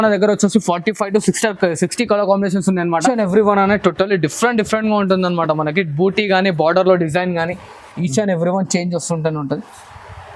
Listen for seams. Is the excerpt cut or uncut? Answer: cut